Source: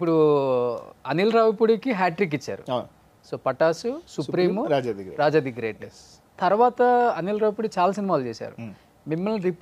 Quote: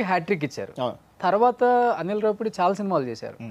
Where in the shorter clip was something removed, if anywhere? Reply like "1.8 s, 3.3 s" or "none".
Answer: 1.0 s